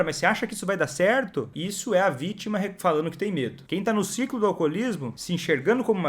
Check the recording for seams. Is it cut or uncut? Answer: cut